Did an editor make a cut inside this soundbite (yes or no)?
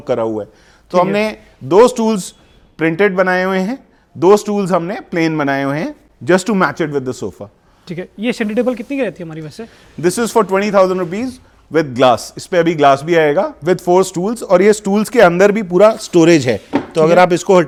no